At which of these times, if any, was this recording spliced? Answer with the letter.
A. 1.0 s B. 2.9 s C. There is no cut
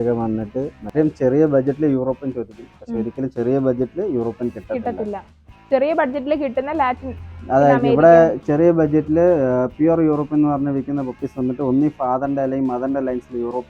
A